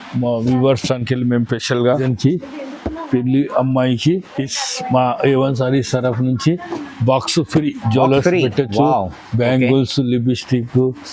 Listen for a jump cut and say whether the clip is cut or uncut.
cut